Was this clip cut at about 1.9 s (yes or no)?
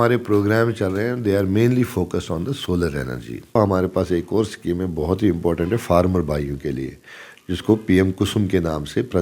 no